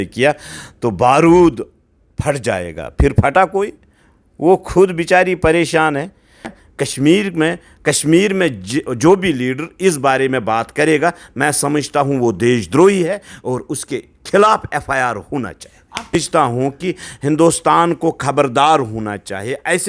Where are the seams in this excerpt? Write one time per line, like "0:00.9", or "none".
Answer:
0:06.6
0:16.1